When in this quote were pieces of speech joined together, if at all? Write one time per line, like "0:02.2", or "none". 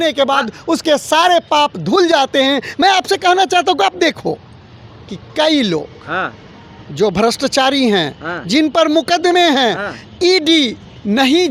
none